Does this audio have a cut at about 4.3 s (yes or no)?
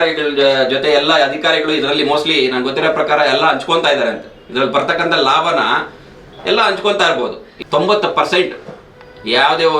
no